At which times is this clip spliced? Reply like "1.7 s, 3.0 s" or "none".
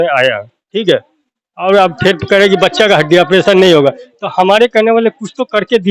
none